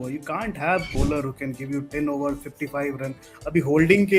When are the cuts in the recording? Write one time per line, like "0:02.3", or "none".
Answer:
0:00.9